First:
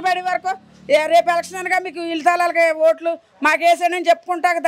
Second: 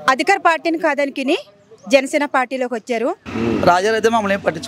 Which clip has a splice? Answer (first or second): second